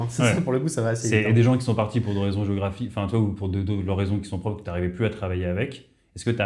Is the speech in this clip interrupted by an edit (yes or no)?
no